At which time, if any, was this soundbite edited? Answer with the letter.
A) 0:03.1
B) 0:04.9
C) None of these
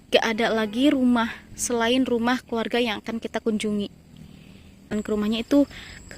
B